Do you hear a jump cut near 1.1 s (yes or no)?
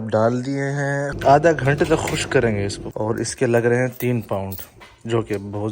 yes